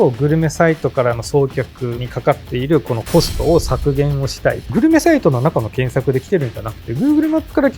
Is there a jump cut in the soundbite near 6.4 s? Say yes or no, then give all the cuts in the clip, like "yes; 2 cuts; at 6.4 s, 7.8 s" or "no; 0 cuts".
no; 2 cuts; at 2.0 s, 4.7 s